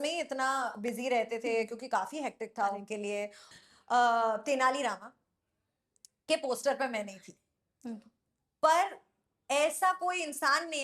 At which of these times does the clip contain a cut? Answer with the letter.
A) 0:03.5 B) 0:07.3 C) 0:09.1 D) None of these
A